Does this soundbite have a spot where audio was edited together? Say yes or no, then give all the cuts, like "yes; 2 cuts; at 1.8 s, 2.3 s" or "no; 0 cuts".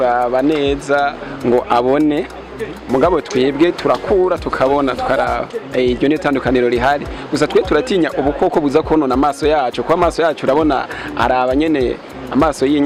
no; 0 cuts